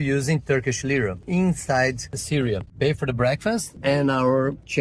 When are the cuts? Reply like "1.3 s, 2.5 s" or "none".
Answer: none

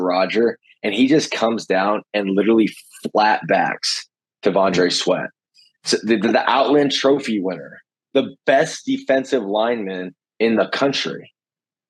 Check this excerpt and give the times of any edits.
none

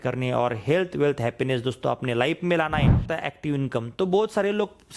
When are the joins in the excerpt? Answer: 3.1 s

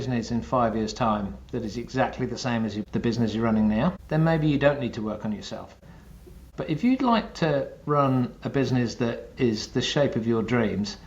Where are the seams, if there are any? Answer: 2.8 s, 4.0 s, 6.0 s

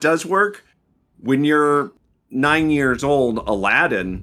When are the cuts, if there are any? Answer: 2.0 s

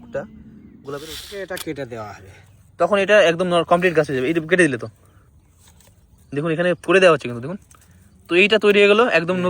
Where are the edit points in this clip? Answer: 1.2 s

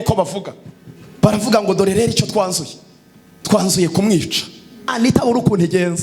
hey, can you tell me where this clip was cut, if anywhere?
4.9 s

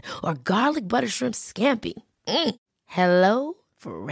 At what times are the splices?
none

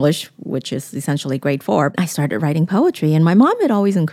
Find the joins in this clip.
2.0 s

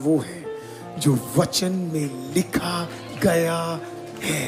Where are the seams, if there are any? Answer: none

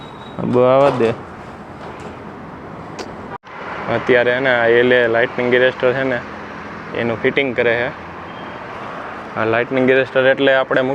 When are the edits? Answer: 3.5 s

